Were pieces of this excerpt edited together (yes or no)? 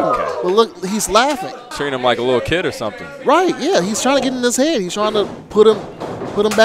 yes